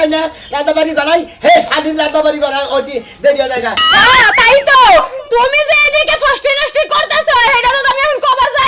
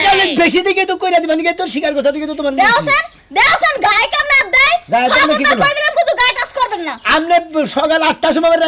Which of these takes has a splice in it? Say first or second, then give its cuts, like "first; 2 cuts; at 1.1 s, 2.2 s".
first; 1 cut; at 3.9 s